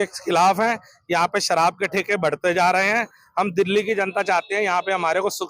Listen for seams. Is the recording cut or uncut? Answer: uncut